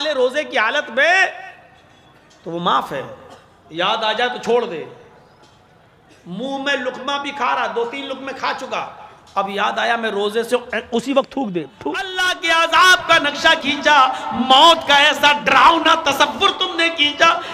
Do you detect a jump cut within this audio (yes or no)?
yes